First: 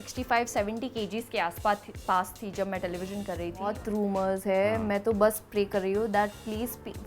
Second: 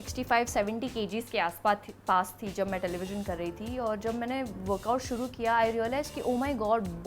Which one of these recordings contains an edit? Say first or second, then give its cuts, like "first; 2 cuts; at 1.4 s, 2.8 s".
first; 1 cut; at 3.8 s